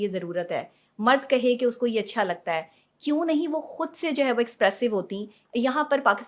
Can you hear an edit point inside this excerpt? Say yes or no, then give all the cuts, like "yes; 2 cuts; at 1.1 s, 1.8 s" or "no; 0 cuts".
yes; 1 cut; at 5.4 s